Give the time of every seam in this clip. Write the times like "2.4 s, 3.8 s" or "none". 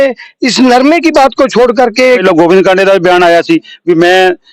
2.2 s